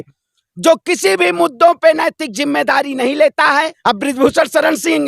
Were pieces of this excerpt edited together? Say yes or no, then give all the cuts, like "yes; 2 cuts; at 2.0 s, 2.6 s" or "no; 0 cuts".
yes; 1 cut; at 3.7 s